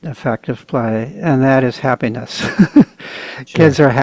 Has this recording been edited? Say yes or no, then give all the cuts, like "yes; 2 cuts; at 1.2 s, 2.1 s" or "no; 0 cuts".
no; 0 cuts